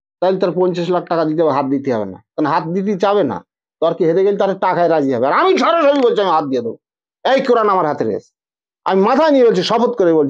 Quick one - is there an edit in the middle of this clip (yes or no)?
no